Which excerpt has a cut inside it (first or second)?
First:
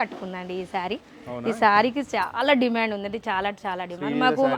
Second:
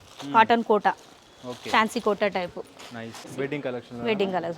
second